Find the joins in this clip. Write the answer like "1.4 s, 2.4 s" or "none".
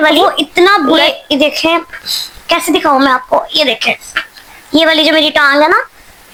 none